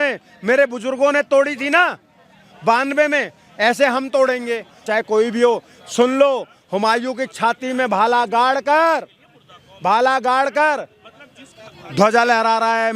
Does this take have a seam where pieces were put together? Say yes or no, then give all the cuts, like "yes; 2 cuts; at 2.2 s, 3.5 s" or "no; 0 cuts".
yes; 1 cut; at 4.8 s